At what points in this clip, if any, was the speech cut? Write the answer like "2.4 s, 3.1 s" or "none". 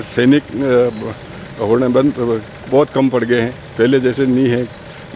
none